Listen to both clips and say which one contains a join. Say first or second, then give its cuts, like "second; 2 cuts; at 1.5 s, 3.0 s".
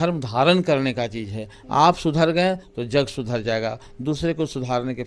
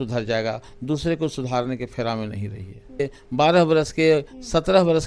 second; 1 cut; at 3.0 s